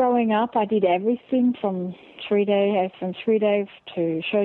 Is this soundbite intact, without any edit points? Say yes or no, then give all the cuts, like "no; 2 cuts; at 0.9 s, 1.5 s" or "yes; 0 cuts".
yes; 0 cuts